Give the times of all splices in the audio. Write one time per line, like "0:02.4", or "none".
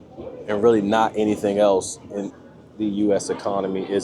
0:02.1